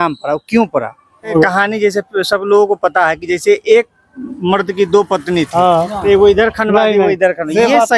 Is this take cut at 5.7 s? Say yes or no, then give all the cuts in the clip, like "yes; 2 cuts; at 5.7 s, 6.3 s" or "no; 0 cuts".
no; 1 cut; at 1.3 s